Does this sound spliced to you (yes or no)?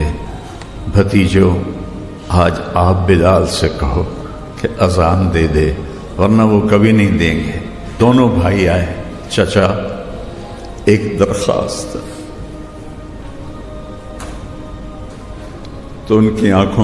yes